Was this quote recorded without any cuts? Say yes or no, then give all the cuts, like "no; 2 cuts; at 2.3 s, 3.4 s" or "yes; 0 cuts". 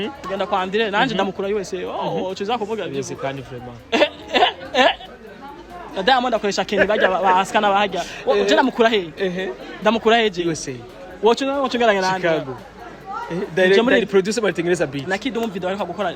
yes; 0 cuts